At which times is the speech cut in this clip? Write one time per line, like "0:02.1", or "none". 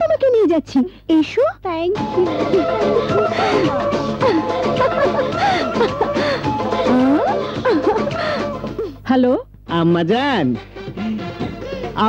0:08.6